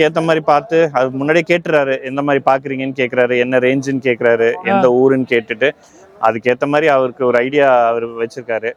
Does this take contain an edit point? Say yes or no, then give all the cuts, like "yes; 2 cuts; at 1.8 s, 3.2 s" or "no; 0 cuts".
no; 0 cuts